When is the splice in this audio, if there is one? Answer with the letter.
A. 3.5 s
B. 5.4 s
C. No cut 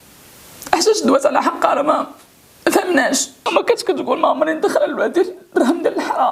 A